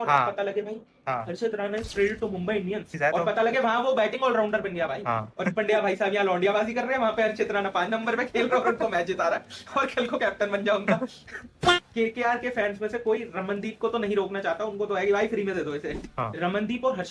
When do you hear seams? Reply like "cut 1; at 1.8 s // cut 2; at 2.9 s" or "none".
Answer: cut 1; at 2.9 s // cut 2; at 5.3 s // cut 3; at 11.7 s // cut 4; at 16.0 s